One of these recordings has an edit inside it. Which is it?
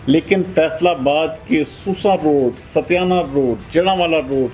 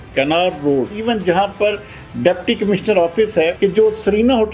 second; 2 cuts; at 1.0 s, 3.5 s

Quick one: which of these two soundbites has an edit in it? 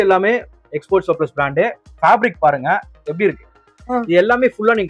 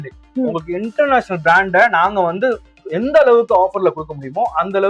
first; 1 cut; at 3.8 s

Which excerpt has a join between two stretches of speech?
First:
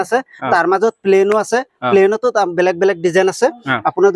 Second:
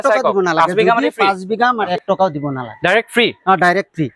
second; 1 cut; at 1.9 s

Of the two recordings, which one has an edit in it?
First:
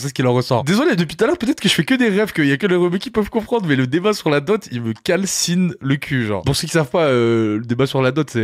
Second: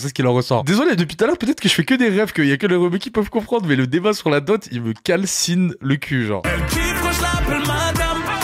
second; 1 cut; at 6.4 s

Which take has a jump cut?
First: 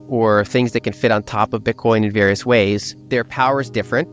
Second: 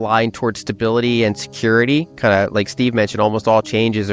first; 1 cut; at 2.9 s

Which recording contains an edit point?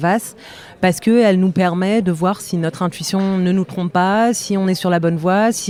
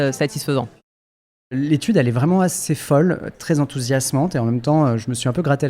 second; 1 cut; at 1.4 s

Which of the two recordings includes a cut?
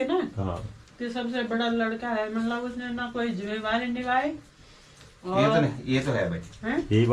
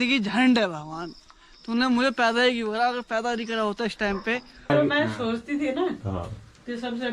second; 1 cut; at 4.7 s

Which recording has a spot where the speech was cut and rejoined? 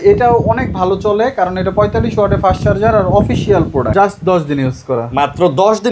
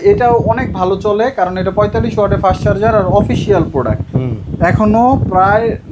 first; 1 cut; at 3.9 s

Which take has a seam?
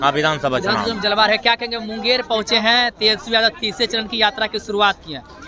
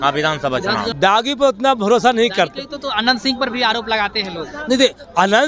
second; 1 cut; at 0.9 s

